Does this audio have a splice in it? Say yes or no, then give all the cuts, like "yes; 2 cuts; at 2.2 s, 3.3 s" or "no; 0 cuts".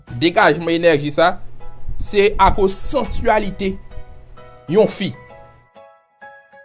no; 0 cuts